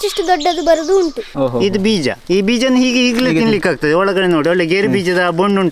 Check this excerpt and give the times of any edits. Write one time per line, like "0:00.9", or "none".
0:01.3
0:02.2